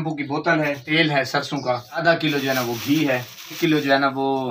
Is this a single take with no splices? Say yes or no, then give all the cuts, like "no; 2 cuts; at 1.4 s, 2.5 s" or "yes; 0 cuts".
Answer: no; 3 cuts; at 0.8 s, 2.0 s, 3.6 s